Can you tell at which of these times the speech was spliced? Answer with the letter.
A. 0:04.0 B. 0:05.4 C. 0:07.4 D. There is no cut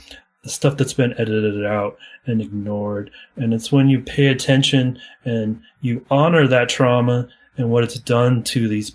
C